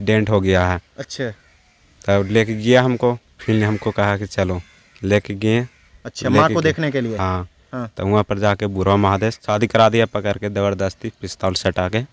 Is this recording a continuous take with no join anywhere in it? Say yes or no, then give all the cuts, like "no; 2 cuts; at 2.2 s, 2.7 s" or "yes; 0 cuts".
no; 2 cuts; at 3.3 s, 9.4 s